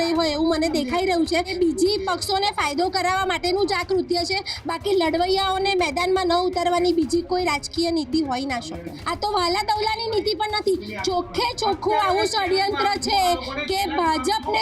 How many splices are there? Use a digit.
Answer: 2